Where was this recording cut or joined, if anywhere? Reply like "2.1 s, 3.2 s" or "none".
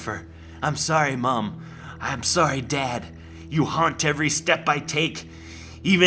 none